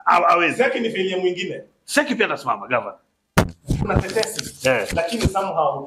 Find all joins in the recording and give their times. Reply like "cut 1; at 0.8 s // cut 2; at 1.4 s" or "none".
none

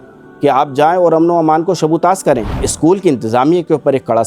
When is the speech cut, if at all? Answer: cut 1; at 2.7 s

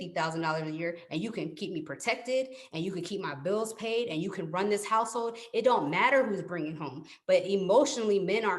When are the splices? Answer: none

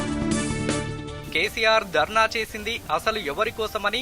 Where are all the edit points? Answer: cut 1; at 1.1 s

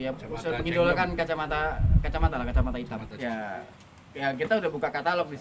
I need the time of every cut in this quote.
cut 1; at 3.1 s

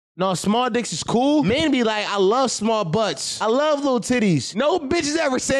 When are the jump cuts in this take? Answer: cut 1; at 1.4 s // cut 2; at 3.3 s // cut 3; at 4.5 s

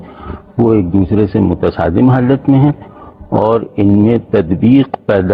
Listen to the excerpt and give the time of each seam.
none

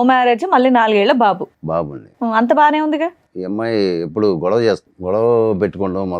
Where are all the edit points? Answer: cut 1; at 3.3 s // cut 2; at 4.9 s

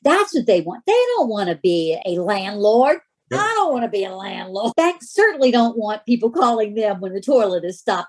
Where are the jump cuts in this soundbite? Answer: cut 1; at 4.7 s

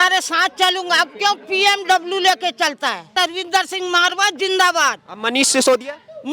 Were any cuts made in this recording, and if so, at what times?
cut 1; at 3.1 s

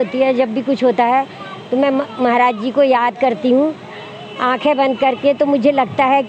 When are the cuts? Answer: none

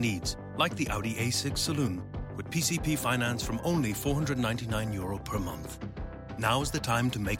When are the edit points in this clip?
none

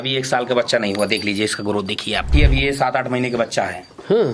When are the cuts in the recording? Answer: none

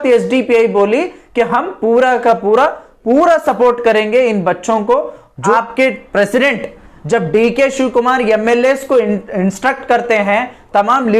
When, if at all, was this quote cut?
cut 1; at 5.5 s

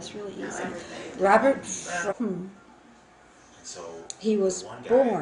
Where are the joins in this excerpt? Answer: none

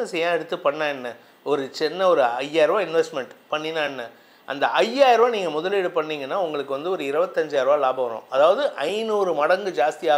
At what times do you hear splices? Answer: none

